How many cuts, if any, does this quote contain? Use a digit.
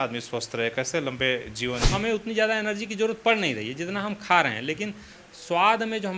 1